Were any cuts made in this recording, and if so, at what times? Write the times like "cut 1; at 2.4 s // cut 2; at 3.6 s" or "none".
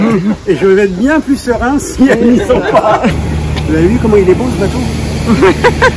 cut 1; at 3.3 s